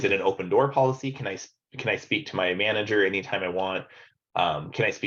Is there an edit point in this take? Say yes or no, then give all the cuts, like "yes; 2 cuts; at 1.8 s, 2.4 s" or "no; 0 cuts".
no; 0 cuts